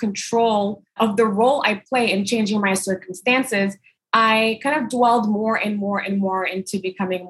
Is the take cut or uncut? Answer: uncut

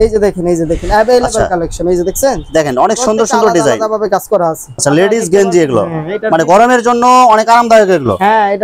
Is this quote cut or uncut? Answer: uncut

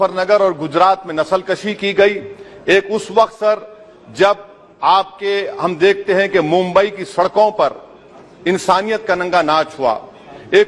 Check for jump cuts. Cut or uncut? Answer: uncut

